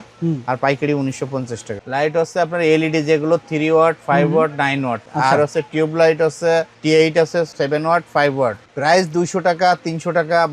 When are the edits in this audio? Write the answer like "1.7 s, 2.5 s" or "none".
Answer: 1.8 s, 5.0 s, 7.5 s, 8.6 s